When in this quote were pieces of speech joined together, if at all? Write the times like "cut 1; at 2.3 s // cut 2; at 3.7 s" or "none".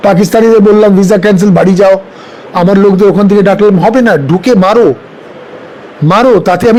none